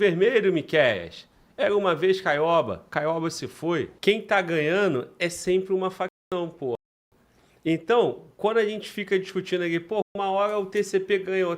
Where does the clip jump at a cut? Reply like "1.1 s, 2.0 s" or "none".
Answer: 3.9 s